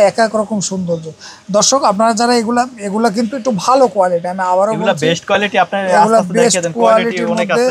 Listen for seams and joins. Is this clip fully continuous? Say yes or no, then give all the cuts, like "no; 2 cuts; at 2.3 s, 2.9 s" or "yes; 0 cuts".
yes; 0 cuts